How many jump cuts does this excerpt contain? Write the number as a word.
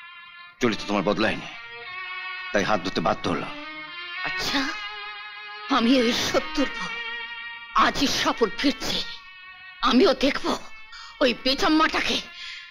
zero